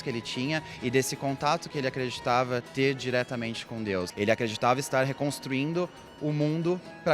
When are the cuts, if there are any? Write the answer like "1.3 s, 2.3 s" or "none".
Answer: 4.1 s